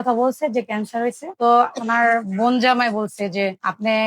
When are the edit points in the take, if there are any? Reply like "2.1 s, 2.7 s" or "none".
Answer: 1.3 s